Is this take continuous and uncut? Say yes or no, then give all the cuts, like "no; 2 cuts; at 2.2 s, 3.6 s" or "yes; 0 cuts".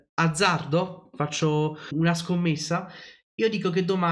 no; 1 cut; at 1.9 s